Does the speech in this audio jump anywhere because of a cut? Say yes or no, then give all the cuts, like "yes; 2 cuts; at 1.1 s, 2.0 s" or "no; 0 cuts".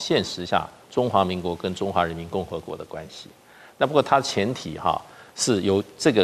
no; 0 cuts